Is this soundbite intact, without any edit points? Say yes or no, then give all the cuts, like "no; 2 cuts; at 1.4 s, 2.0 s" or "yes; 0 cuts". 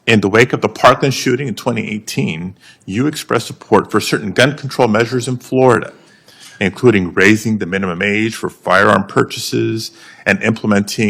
yes; 0 cuts